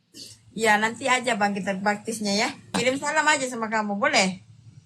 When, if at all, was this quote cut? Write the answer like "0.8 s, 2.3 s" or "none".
2.7 s